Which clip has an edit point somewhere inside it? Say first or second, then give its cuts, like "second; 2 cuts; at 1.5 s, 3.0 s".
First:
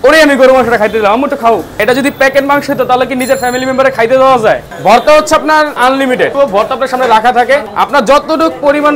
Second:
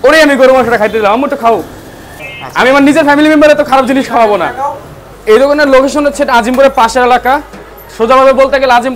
first; 4 cuts; at 1.8 s, 4.7 s, 6.3 s, 7.7 s